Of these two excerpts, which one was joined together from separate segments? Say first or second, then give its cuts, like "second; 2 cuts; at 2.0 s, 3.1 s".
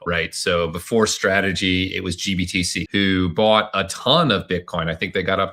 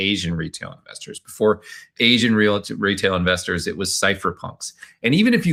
first; 1 cut; at 2.8 s